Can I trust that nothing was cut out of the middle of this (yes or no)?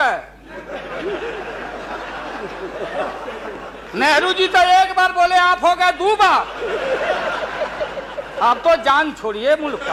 yes